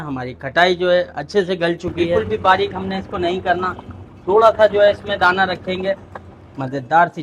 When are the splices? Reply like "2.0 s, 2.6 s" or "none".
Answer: 2.2 s, 6.1 s